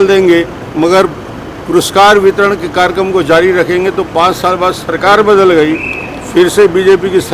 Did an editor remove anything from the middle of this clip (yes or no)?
no